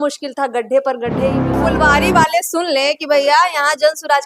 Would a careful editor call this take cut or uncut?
cut